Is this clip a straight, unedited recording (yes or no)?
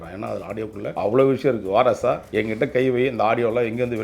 no